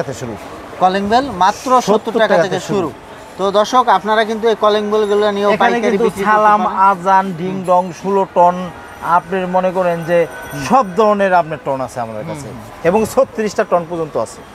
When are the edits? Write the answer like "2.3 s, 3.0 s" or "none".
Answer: none